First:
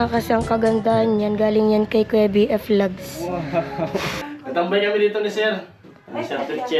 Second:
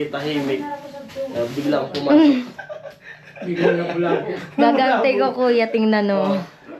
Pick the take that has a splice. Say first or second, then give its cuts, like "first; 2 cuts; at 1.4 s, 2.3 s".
first; 1 cut; at 4.3 s